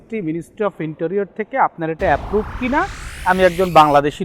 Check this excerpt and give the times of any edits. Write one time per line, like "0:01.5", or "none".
0:03.1